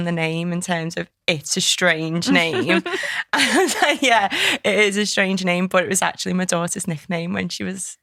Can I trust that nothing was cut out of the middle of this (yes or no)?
yes